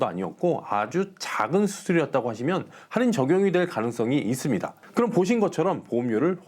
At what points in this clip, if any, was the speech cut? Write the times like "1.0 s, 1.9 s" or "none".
4.8 s